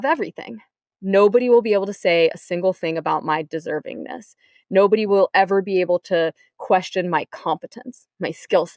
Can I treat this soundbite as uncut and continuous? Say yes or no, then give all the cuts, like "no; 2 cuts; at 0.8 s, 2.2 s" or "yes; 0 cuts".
yes; 0 cuts